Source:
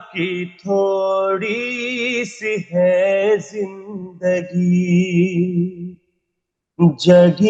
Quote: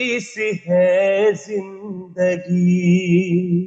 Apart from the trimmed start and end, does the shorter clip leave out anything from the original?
no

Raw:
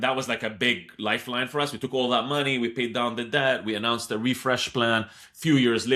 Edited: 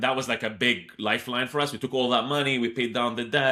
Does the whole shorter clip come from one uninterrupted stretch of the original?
yes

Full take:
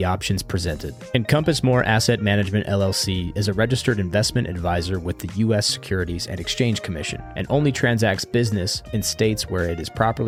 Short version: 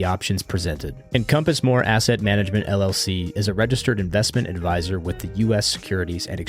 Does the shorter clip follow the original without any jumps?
yes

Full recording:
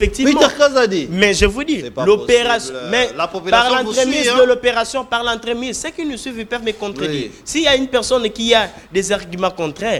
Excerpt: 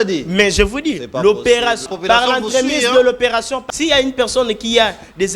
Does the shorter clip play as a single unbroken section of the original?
no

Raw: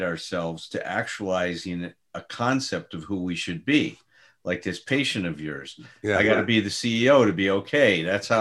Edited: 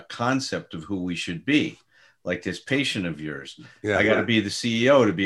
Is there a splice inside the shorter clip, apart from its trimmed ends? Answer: no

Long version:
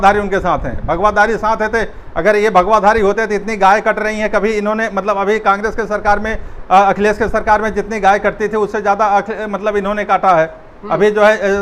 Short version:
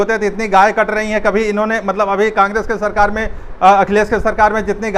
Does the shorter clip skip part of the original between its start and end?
no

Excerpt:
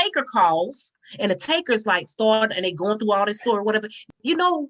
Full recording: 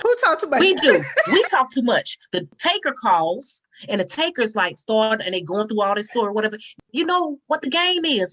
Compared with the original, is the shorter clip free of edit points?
yes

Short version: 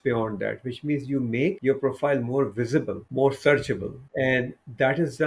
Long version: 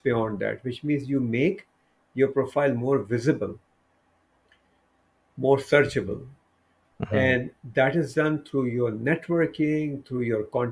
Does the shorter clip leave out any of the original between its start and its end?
yes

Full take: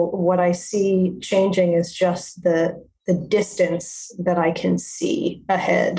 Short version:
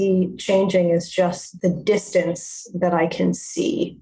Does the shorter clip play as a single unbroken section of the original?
no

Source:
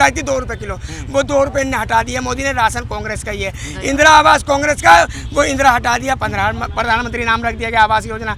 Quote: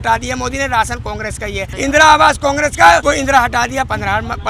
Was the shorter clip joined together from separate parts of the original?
yes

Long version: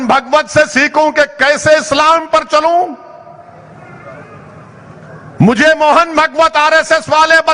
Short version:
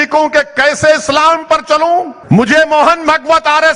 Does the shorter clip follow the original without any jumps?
no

